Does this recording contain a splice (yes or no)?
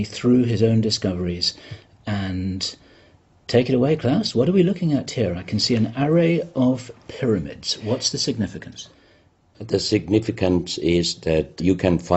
yes